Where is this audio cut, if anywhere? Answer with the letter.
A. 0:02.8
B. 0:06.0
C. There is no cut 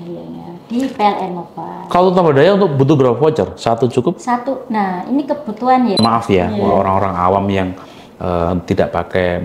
B